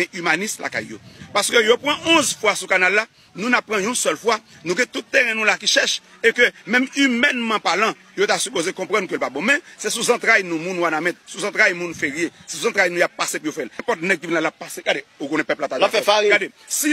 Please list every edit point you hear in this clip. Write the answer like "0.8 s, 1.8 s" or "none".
13.8 s